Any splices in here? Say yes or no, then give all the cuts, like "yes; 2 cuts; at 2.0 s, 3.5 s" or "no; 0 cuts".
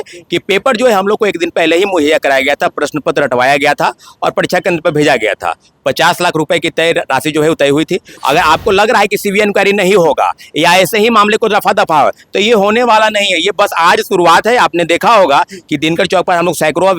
yes; 1 cut; at 8.1 s